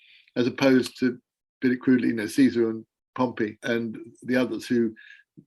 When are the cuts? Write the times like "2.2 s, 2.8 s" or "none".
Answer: 3.6 s